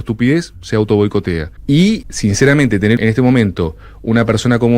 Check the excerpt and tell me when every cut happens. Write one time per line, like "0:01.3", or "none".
0:01.5
0:02.1
0:03.0